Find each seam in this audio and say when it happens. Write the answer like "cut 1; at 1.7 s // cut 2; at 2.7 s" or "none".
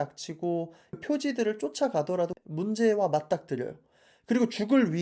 cut 1; at 1.0 s

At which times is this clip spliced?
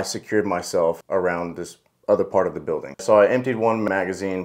cut 1; at 2.9 s

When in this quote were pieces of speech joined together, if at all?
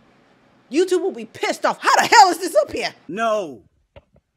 cut 1; at 3.0 s

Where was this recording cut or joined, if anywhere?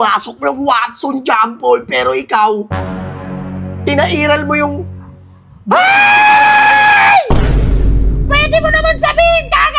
none

